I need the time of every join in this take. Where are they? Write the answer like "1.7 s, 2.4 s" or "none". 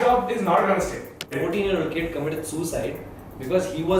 1.3 s